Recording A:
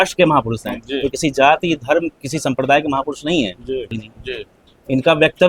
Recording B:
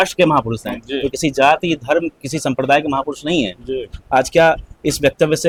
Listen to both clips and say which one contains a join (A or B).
A